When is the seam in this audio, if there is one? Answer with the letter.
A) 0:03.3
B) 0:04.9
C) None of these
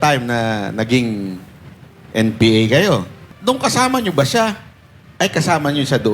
A